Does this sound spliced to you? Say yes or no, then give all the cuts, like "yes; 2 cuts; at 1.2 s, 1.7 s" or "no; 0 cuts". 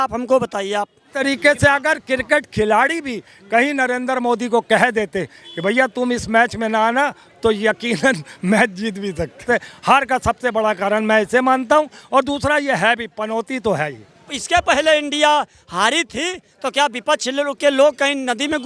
yes; 3 cuts; at 1.2 s, 9.4 s, 14.3 s